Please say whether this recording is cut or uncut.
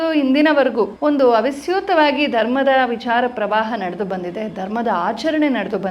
cut